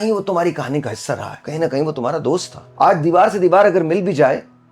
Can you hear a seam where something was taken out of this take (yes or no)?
yes